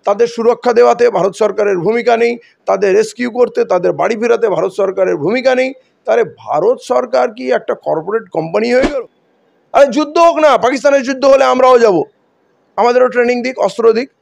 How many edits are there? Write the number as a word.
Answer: one